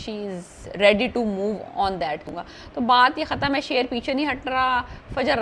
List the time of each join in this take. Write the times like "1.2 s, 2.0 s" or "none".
2.4 s